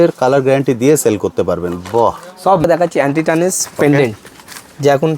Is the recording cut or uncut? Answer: cut